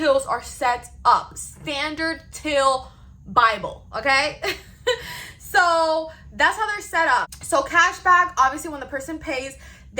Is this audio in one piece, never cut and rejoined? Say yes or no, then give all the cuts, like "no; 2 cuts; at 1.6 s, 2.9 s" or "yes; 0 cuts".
no; 1 cut; at 7.4 s